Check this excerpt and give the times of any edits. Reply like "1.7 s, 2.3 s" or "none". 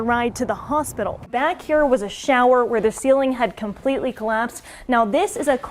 1.3 s